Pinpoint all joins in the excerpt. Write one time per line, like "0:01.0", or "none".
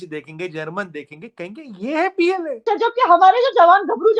0:02.7